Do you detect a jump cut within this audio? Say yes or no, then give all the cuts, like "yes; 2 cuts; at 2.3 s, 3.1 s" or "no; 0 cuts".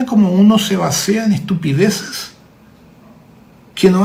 no; 0 cuts